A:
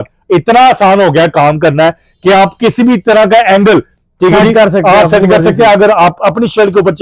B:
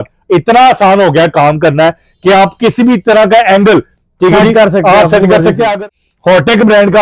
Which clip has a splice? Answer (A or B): B